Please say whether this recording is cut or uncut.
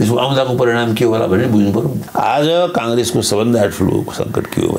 cut